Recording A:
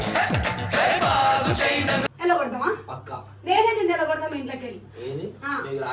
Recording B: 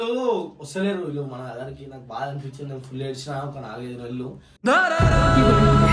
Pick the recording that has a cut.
A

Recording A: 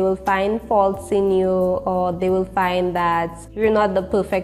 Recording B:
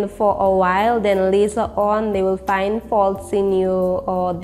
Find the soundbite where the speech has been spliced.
A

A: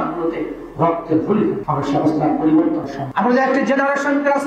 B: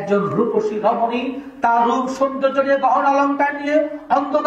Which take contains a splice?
A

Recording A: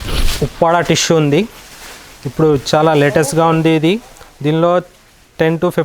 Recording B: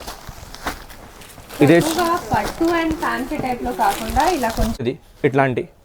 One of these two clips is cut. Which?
B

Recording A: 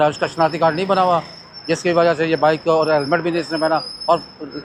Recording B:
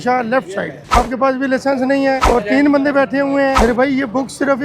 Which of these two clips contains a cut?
B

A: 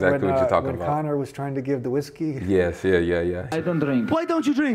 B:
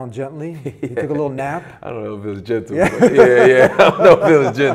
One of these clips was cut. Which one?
A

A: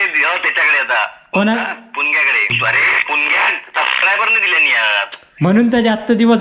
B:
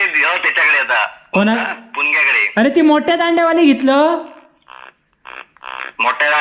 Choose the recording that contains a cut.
A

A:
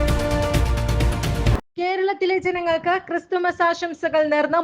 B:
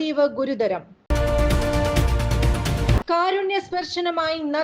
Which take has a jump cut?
A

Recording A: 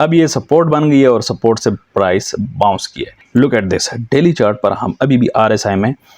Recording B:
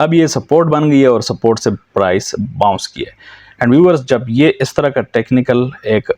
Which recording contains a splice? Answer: A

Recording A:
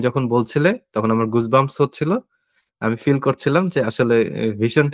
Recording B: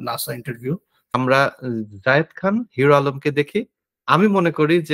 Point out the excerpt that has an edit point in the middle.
B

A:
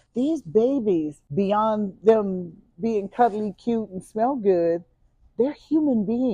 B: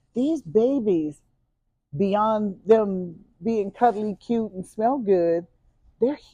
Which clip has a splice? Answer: A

